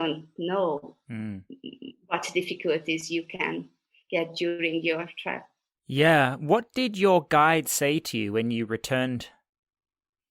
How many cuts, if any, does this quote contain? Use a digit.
0